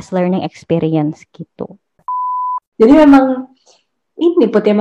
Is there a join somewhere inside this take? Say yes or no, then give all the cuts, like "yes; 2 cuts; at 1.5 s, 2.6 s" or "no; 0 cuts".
yes; 1 cut; at 2.2 s